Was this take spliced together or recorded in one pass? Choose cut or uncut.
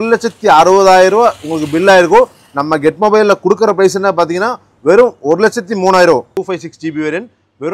cut